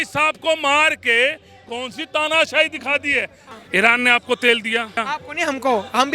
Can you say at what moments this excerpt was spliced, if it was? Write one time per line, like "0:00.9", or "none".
0:03.4
0:05.0